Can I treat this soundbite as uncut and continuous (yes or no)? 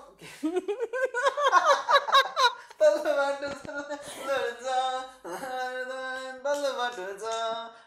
yes